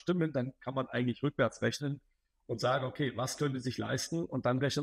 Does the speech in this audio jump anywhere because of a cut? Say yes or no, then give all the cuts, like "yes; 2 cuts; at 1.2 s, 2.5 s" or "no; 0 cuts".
no; 0 cuts